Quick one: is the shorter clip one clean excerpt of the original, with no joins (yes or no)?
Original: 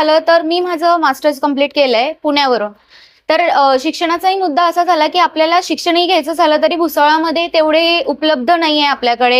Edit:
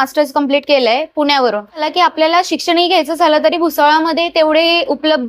no